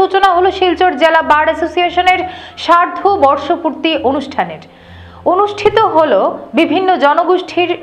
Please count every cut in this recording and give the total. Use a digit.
0